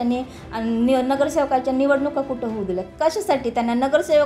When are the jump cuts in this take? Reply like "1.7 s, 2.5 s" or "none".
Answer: none